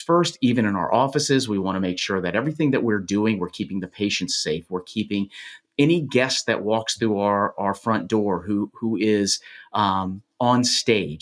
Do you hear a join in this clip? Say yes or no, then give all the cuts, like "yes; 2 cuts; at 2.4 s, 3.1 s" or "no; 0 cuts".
no; 0 cuts